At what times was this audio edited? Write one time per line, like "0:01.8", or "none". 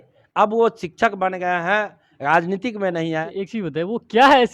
0:03.3